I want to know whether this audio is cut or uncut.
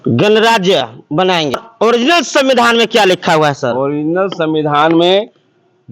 cut